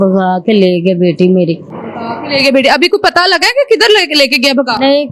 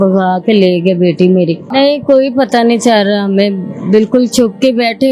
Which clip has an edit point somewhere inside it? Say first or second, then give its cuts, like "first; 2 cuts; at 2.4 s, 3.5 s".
second; 1 cut; at 1.7 s